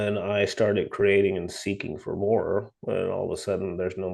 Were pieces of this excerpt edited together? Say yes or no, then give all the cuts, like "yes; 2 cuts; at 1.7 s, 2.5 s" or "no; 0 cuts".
no; 0 cuts